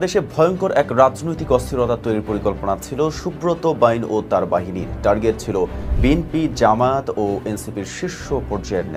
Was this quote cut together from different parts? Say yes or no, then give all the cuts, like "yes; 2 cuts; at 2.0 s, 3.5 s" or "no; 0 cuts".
no; 0 cuts